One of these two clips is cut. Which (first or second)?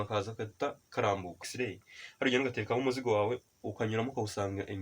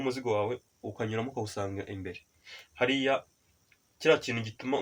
first